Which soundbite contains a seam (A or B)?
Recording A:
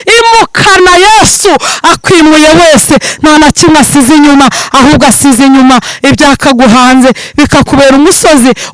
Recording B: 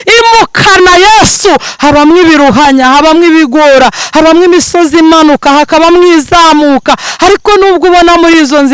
B